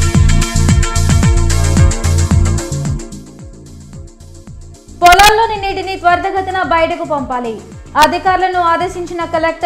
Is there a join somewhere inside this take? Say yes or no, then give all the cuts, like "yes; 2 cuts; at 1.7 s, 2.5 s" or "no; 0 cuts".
no; 0 cuts